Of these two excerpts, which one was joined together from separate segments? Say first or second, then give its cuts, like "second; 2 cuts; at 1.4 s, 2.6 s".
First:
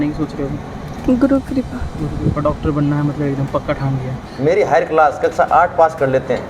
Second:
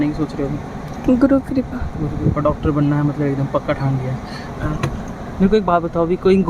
first; 1 cut; at 4.4 s